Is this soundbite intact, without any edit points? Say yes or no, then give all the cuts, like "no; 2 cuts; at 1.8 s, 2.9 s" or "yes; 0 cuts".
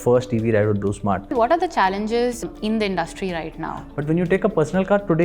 no; 3 cuts; at 1.3 s, 2.4 s, 3.9 s